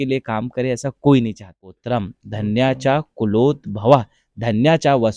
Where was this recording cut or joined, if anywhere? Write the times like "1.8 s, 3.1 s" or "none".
1.8 s